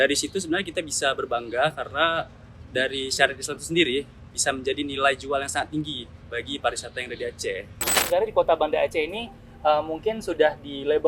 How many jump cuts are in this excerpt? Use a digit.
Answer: 1